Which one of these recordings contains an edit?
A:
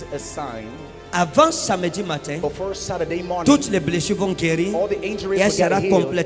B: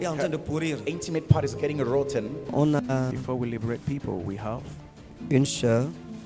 B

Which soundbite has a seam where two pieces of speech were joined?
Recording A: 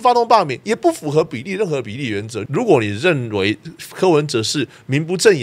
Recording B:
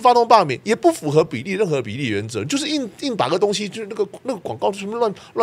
A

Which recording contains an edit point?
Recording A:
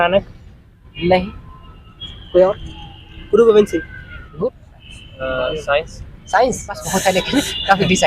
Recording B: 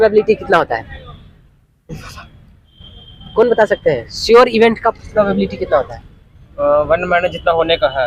A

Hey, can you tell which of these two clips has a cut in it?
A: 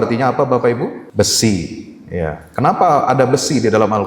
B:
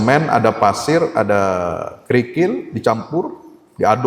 A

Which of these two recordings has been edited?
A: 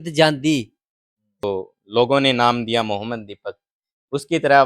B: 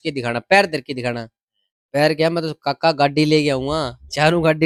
A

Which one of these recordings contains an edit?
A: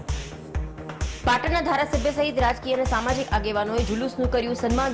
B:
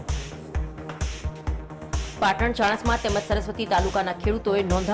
B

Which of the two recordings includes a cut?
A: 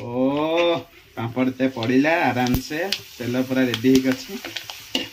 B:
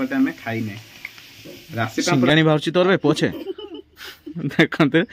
B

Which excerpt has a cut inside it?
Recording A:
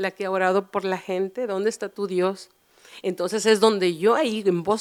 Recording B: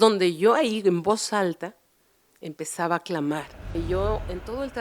B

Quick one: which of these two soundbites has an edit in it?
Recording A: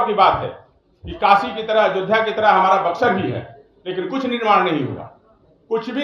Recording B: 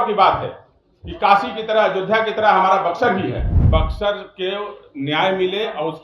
B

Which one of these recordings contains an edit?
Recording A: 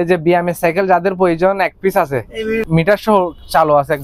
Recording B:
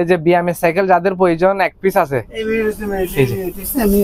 A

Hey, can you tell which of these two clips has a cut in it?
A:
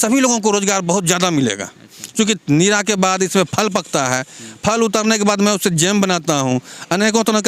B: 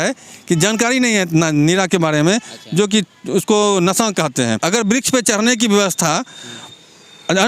B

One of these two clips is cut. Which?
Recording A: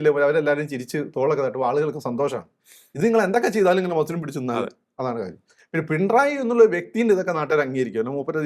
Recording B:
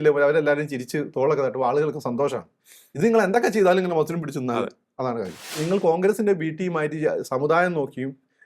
B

